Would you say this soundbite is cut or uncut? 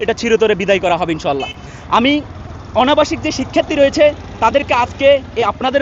uncut